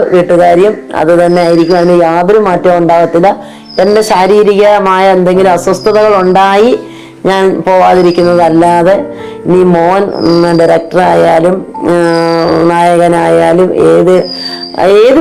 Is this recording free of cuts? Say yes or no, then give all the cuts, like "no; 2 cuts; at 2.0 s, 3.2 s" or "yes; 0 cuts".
yes; 0 cuts